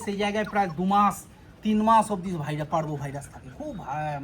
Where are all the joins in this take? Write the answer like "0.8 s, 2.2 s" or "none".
none